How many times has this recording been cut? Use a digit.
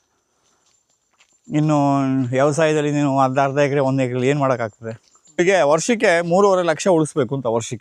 1